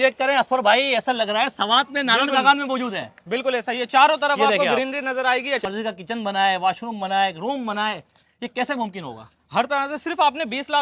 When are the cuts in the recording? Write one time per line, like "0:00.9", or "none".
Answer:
0:05.6